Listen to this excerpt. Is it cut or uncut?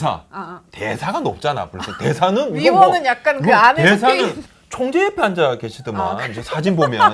cut